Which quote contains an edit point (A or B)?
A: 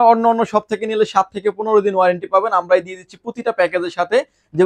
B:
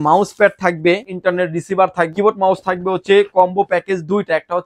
B